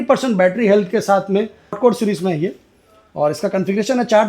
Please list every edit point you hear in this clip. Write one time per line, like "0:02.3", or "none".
0:01.8